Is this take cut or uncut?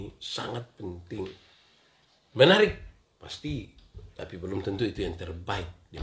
uncut